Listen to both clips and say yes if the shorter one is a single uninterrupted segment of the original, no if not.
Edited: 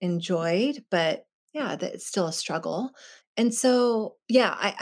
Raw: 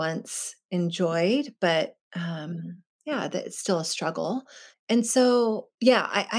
no